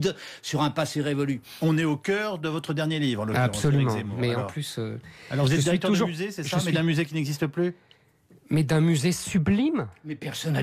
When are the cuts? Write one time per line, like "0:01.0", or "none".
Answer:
0:04.5